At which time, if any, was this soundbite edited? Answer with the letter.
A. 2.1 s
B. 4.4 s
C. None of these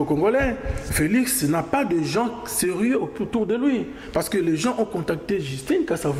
C